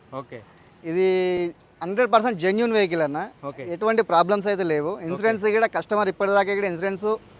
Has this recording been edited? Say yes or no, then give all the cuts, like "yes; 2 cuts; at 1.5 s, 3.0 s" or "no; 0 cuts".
no; 0 cuts